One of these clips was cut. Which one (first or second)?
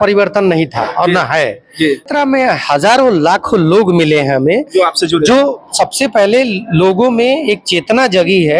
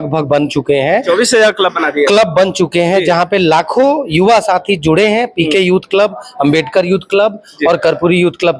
first